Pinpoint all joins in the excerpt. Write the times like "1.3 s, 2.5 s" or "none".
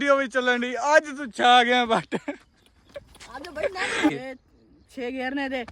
4.2 s